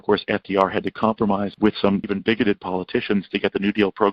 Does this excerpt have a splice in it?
yes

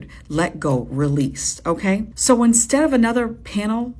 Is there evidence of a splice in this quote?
yes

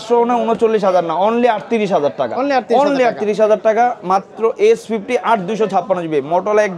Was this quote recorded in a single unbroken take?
yes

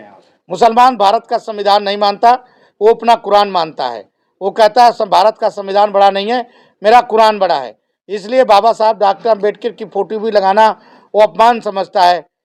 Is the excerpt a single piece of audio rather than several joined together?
yes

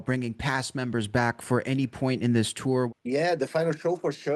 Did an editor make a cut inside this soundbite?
yes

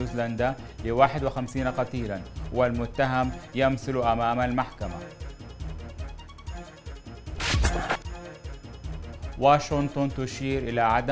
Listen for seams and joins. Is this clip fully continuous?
no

